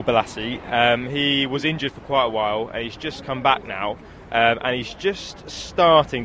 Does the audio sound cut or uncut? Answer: uncut